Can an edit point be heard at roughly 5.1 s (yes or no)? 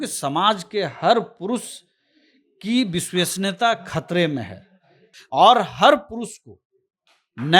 yes